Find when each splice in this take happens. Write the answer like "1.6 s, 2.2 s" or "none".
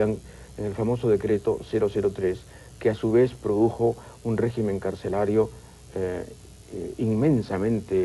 5.0 s